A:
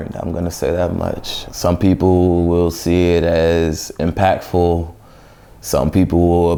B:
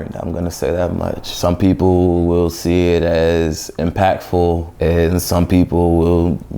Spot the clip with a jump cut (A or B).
B